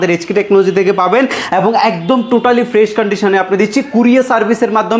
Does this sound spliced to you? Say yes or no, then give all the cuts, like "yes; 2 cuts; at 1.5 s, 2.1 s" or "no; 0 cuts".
no; 0 cuts